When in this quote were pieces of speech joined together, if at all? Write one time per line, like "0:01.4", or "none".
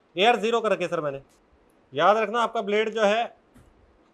0:01.4

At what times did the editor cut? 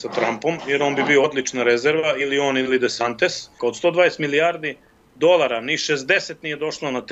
0:03.6

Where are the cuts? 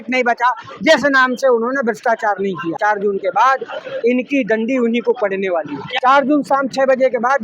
0:02.8
0:05.9

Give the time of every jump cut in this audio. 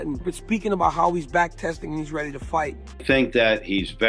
0:02.9

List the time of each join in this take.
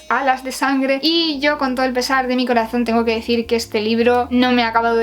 none

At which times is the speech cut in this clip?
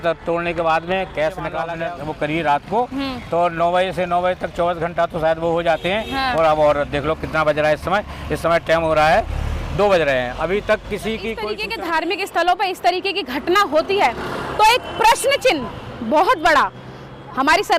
0:01.7
0:11.6

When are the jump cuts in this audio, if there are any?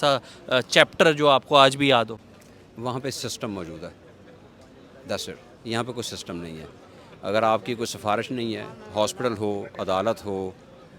none

